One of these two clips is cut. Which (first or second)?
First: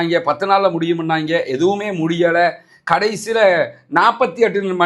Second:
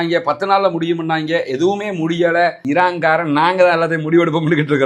second